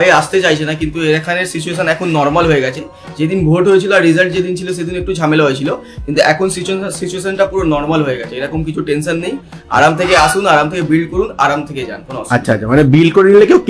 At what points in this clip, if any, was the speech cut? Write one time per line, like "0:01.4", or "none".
none